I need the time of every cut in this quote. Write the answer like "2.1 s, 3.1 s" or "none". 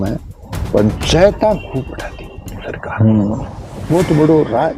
none